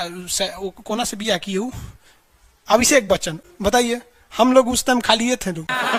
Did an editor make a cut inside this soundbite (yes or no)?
no